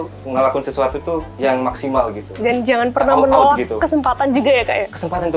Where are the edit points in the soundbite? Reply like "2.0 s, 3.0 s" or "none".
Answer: 1.3 s